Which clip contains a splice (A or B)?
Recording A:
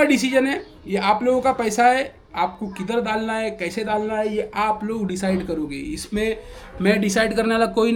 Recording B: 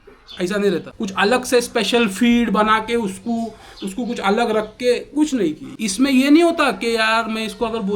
B